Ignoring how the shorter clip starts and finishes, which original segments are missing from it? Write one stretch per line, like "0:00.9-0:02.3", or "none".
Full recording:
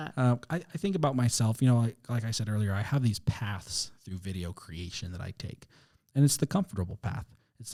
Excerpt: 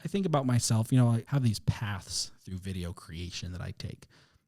0:02.0-0:02.9

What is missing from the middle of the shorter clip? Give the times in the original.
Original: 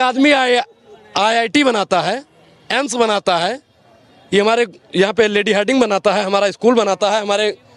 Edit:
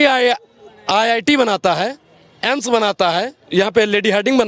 0:03.7-0:04.8

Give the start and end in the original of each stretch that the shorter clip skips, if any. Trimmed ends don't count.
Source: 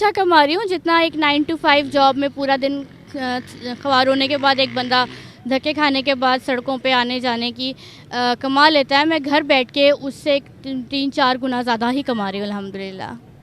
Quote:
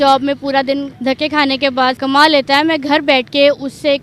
0:02.9-0:05.4
0:06.4-0:08.4

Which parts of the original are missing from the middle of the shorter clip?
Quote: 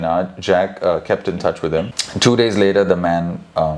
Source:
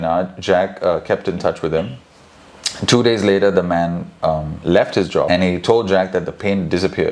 0:02.0-0:02.7

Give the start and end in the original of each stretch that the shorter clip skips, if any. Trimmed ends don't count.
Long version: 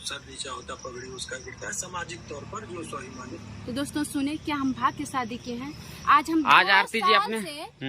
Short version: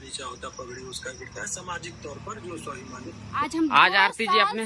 0:03.7-0:06.2

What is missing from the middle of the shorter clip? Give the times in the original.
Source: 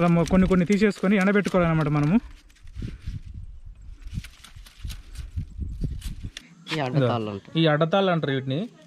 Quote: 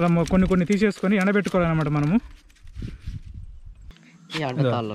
0:04.0-0:06.4

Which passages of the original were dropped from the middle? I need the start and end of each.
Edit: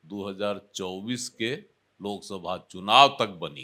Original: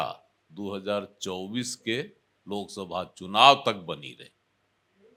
none

